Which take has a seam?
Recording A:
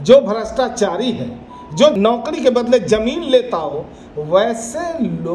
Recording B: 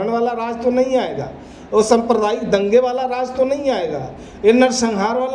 A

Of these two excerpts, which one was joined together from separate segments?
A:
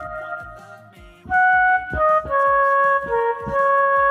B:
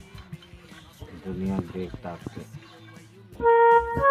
B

